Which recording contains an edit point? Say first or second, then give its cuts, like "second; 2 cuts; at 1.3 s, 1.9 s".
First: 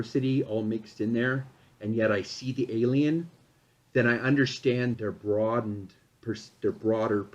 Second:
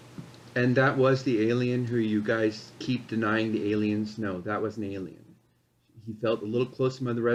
first; 1 cut; at 4.9 s